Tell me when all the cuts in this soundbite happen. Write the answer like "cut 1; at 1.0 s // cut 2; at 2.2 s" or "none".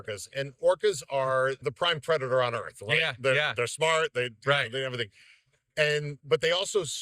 cut 1; at 1.6 s